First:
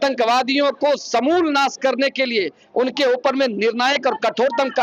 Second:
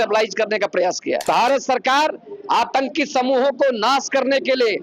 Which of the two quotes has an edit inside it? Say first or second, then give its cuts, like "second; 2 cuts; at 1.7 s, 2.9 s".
second; 1 cut; at 1.2 s